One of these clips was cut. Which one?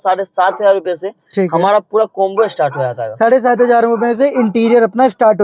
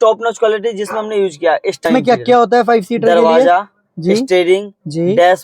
second; 1 cut; at 1.8 s

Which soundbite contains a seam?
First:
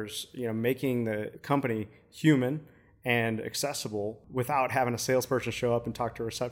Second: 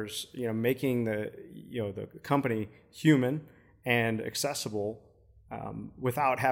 first; 2 cuts; at 1.4 s, 4.2 s

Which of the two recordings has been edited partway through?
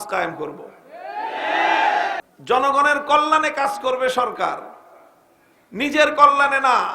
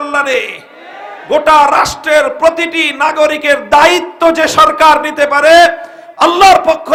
first; 1 cut; at 2.2 s

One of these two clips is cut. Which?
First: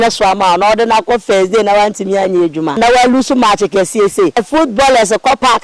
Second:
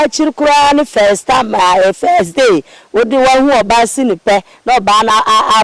first; 2 cuts; at 2.8 s, 4.4 s

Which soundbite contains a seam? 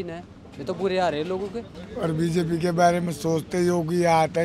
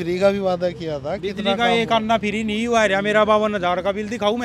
first; 1 cut; at 1.8 s

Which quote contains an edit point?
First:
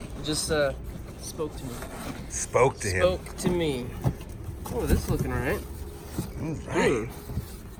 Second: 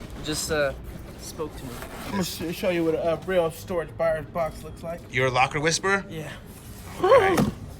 second; 1 cut; at 2.1 s

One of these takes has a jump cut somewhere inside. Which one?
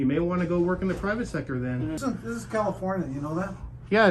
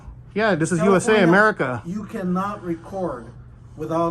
first; 1 cut; at 2.0 s

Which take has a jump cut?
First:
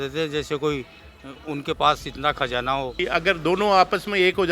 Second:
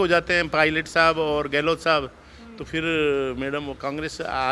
first; 1 cut; at 3.0 s

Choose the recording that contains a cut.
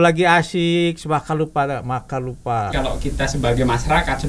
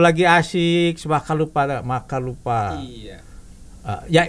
first; 1 cut; at 2.7 s

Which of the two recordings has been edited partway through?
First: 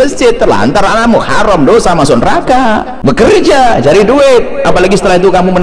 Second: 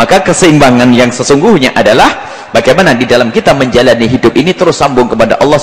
first; 1 cut; at 2.9 s

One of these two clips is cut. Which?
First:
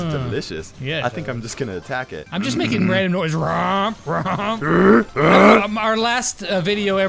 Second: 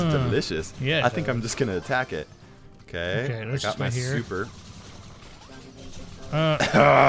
first; 2 cuts; at 2.2 s, 4.6 s

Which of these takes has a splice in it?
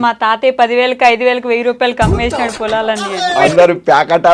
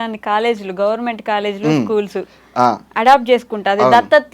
first; 1 cut; at 3.3 s

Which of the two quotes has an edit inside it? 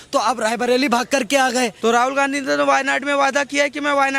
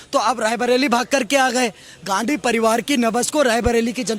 first; 1 cut; at 1.7 s

